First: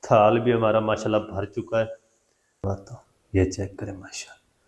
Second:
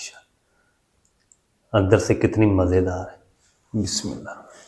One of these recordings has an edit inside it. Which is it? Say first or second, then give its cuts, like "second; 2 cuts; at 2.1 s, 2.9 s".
first; 1 cut; at 2.6 s